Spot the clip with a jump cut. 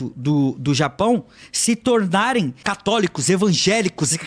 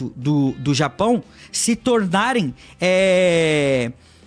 first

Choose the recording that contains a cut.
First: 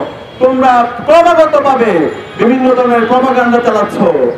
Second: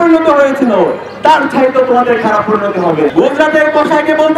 second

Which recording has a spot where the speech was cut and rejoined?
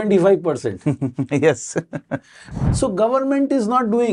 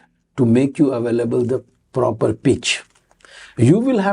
first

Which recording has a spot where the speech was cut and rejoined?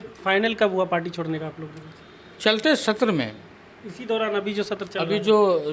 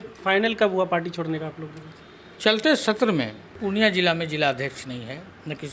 second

